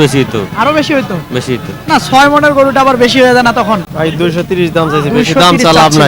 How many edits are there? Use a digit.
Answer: 1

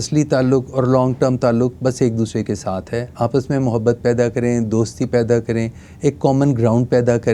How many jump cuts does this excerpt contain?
0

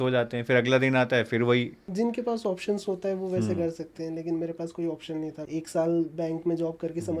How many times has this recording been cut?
2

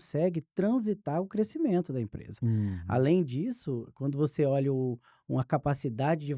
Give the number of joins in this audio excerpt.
0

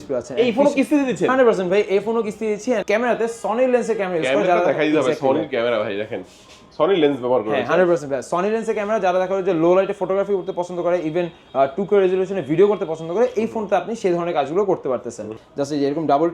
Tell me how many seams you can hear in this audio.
2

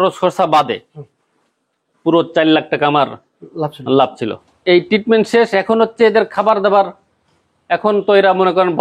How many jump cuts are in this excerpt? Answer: 1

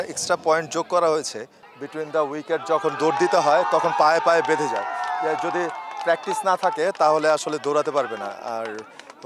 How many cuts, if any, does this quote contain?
1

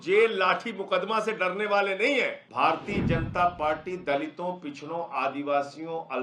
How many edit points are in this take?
1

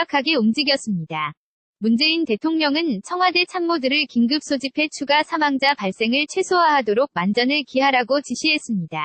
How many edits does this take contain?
0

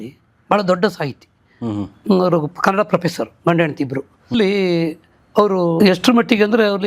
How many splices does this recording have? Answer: 2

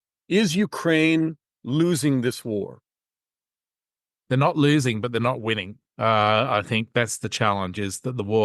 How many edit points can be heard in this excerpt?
0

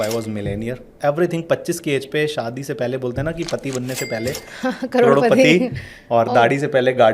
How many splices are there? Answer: 1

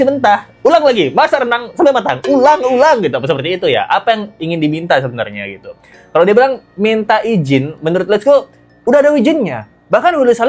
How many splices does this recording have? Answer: 0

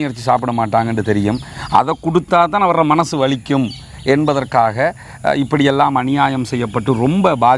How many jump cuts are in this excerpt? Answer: 0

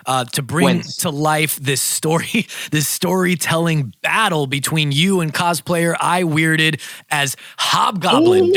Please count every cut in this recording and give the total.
0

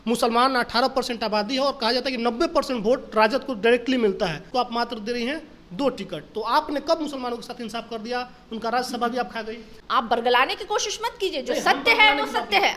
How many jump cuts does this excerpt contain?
2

